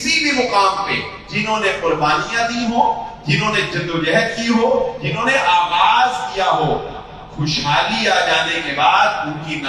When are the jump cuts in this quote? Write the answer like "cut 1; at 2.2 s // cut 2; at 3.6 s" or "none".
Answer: none